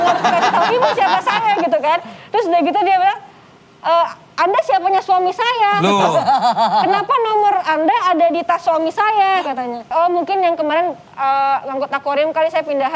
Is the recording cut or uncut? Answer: cut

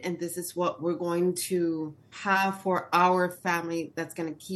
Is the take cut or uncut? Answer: cut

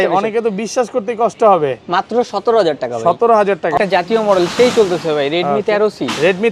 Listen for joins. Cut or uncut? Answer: cut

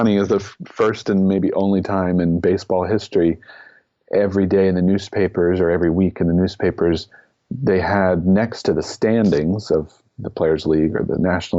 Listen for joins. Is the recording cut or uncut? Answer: uncut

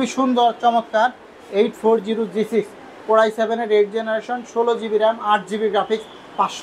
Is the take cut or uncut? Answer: uncut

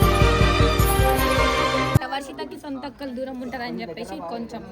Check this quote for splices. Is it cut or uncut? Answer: cut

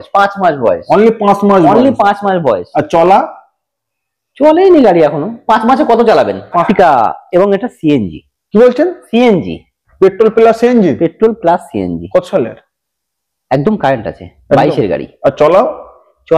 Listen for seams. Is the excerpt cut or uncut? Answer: cut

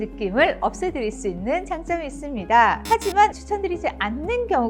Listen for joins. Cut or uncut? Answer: cut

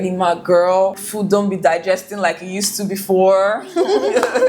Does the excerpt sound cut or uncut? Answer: cut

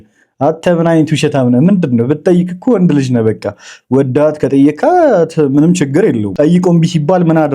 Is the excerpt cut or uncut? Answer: cut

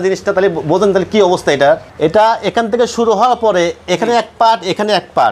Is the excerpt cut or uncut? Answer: cut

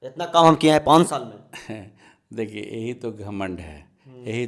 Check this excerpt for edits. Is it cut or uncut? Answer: uncut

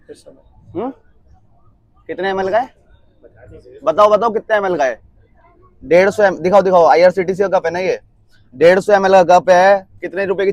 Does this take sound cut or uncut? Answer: uncut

